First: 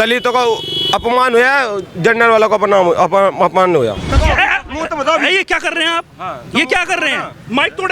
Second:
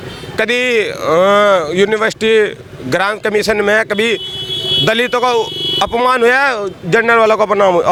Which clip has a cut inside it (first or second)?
first